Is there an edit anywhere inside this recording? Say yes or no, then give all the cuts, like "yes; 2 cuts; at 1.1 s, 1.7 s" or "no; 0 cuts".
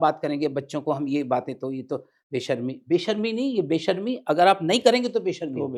no; 0 cuts